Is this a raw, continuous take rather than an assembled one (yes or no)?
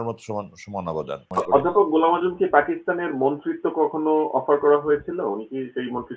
no